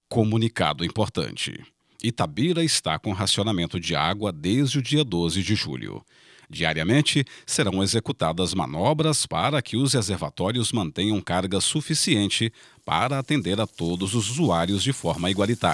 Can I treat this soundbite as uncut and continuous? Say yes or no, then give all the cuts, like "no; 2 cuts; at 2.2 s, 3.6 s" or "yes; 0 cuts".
yes; 0 cuts